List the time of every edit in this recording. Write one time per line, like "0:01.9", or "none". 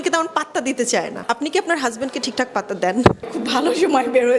0:01.2
0:03.3